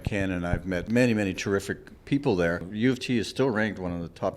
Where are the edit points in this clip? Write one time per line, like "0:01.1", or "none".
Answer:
0:00.8
0:02.7